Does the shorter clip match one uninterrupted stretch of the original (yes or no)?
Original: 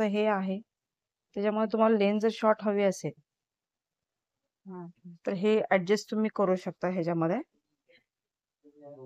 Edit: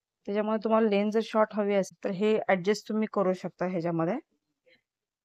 no